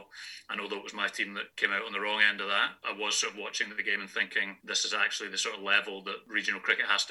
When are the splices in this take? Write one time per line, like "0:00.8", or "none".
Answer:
0:01.5
0:02.8
0:04.6
0:06.2